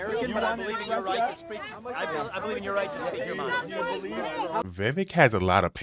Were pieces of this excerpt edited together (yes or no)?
yes